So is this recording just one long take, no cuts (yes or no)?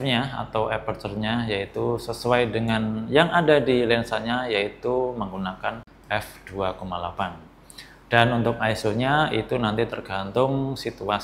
yes